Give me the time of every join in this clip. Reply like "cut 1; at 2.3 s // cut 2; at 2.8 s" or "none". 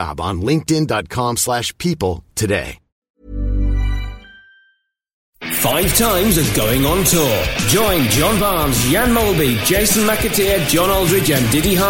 cut 1; at 3.2 s // cut 2; at 5.3 s